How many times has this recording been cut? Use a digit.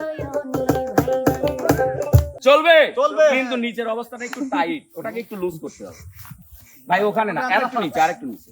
1